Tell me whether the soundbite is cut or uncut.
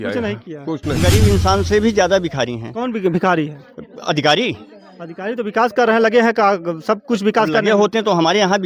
cut